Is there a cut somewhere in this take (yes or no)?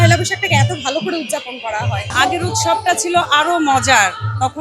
yes